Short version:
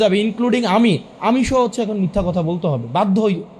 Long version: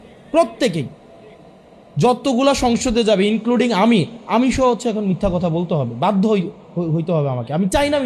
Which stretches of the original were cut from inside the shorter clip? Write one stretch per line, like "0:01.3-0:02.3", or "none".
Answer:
none